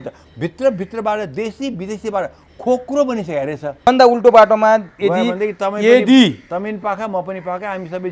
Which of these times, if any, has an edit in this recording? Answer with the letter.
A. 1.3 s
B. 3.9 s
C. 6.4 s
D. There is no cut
B